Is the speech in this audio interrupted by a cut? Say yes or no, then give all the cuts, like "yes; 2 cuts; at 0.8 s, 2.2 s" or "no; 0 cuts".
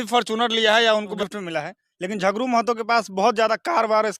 yes; 1 cut; at 1.1 s